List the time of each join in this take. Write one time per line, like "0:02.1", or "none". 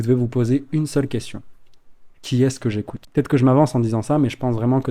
0:03.0